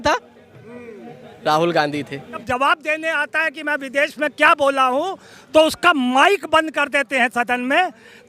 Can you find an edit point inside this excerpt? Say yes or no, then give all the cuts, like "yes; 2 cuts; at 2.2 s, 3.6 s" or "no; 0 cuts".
yes; 1 cut; at 2.4 s